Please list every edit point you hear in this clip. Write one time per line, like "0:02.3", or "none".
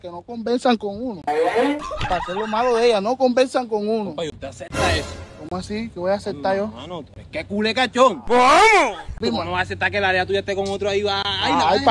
none